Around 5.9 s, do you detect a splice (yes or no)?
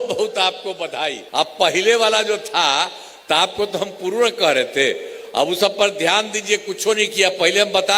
no